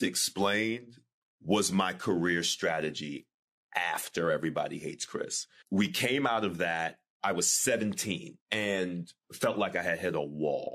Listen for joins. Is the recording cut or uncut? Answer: cut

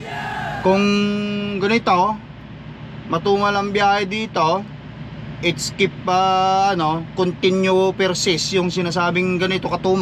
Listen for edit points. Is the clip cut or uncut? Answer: uncut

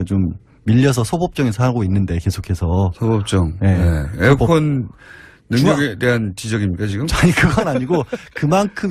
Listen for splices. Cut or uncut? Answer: cut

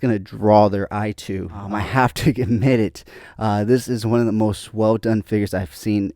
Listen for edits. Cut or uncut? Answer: cut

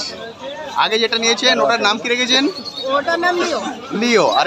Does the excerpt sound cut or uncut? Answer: uncut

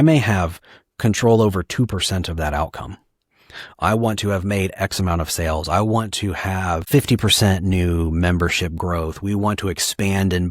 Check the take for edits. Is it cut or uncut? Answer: cut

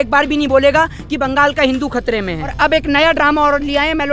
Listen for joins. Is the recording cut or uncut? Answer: cut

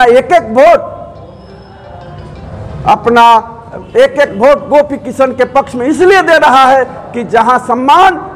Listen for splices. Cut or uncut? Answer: uncut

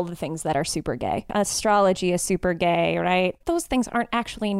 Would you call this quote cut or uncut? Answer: cut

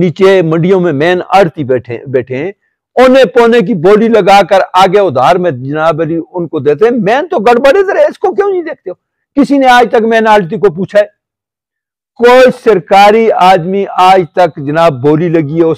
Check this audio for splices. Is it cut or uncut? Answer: uncut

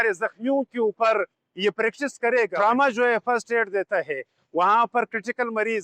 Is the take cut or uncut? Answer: cut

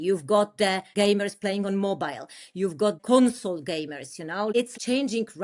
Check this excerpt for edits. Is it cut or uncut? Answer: cut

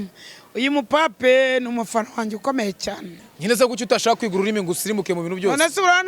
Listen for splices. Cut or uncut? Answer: cut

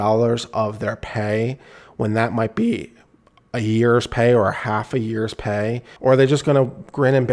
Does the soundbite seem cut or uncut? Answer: cut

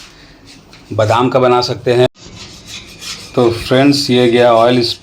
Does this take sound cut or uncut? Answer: cut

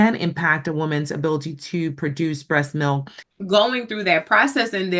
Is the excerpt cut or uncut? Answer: cut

